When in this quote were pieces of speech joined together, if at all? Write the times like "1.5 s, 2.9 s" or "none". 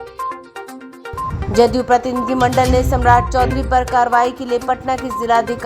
1.3 s